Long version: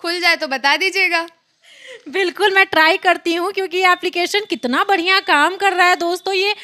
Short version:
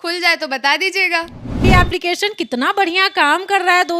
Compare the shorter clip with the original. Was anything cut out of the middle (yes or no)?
yes